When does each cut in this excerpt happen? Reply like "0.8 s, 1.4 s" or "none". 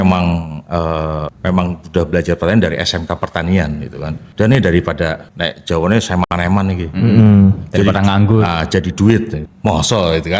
none